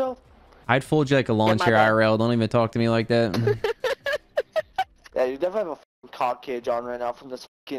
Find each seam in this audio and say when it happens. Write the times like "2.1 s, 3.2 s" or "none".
5.0 s